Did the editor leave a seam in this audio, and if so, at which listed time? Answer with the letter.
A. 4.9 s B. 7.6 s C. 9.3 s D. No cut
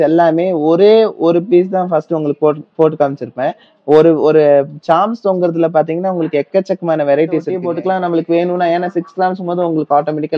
B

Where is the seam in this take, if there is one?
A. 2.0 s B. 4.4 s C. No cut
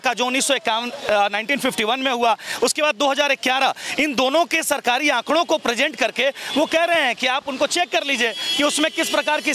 C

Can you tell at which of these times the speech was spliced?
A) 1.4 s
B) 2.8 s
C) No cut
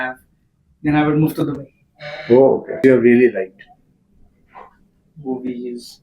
B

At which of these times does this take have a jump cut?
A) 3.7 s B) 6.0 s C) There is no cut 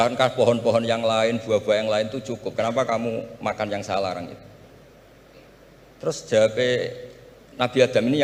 C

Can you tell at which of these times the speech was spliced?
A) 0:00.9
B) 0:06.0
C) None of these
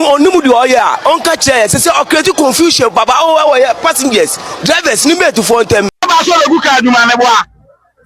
B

